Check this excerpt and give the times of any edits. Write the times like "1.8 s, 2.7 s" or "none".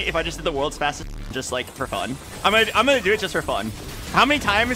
2.3 s